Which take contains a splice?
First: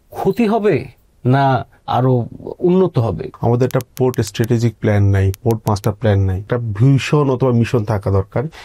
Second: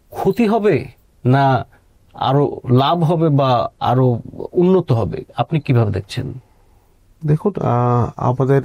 first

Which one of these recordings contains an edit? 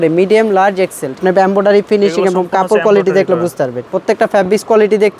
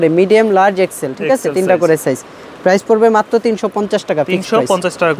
first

